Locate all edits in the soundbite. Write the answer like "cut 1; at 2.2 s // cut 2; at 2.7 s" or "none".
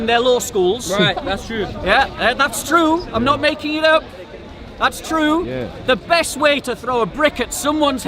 none